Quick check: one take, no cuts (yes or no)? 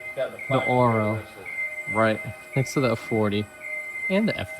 yes